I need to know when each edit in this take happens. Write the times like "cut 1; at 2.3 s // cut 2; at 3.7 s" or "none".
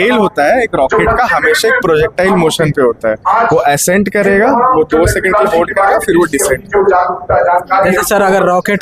none